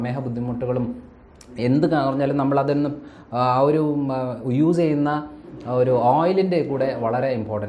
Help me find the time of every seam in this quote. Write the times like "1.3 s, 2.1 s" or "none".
none